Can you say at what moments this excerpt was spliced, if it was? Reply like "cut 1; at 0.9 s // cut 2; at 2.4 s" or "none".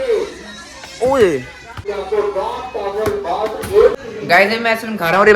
cut 1; at 1.9 s // cut 2; at 4.0 s